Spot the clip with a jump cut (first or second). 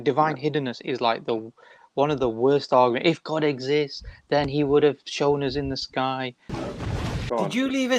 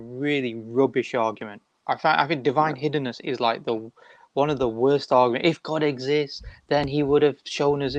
first